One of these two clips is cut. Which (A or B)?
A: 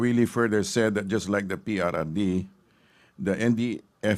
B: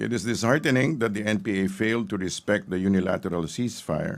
B